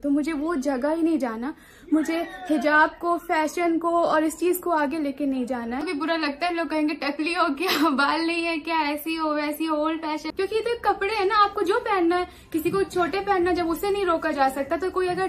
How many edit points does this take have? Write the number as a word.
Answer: two